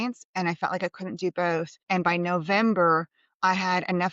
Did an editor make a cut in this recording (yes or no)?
yes